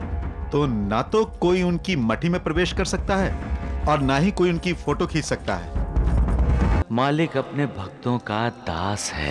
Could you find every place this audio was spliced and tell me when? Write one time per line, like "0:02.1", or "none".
0:06.8